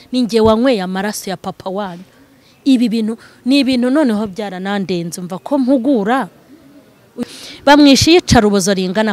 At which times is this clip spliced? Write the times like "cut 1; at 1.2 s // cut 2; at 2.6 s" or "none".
cut 1; at 7.1 s